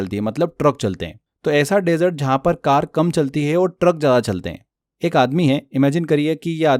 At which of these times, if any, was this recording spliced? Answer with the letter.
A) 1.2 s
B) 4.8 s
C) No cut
B